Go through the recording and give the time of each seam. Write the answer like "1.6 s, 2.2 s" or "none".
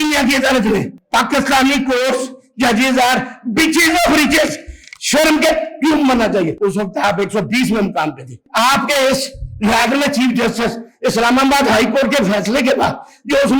1.0 s, 6.5 s, 8.4 s